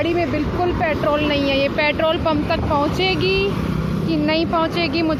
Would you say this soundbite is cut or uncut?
uncut